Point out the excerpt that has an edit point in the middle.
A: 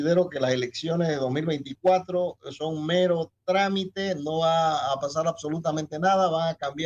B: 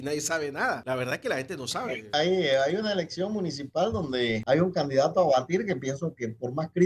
B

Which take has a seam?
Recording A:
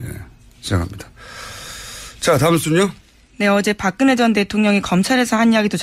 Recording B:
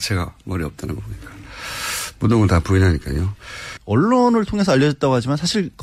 B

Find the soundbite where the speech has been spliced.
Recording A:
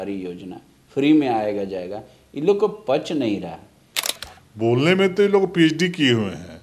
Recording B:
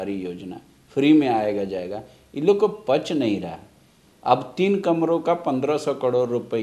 A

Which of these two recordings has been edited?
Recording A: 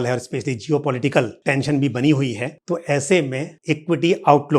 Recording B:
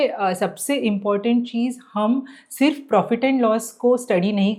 A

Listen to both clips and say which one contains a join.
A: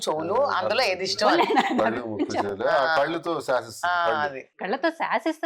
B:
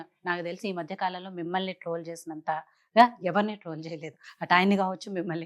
A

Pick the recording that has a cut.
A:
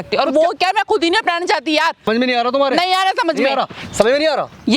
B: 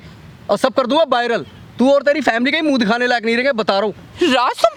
A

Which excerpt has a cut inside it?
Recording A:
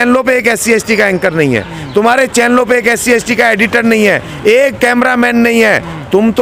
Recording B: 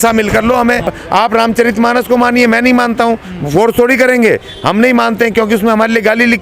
B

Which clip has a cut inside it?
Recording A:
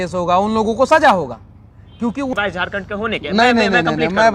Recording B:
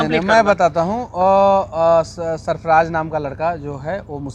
A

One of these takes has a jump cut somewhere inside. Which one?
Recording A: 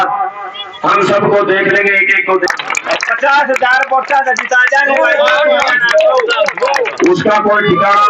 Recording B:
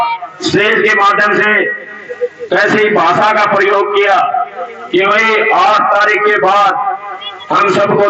A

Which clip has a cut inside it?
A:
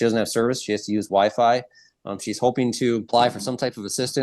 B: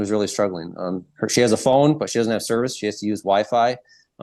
A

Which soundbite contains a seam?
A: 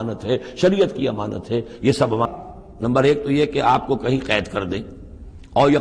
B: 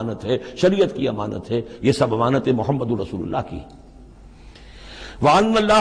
A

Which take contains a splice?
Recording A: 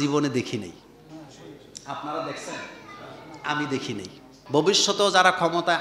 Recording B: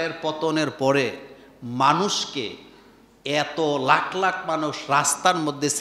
A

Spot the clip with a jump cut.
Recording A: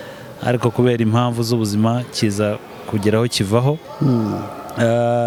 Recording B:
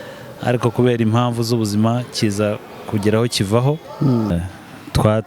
B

